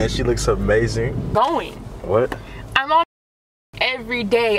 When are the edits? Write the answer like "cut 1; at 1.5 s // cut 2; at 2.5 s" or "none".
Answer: cut 1; at 1.3 s